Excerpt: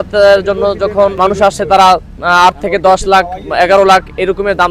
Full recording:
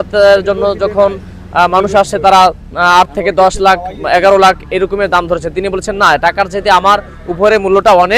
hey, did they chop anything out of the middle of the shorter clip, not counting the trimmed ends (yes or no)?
yes